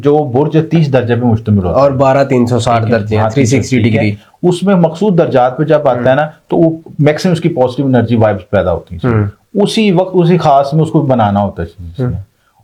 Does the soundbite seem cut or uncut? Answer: uncut